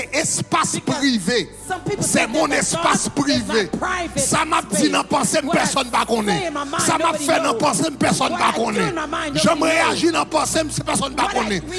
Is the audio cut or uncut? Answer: uncut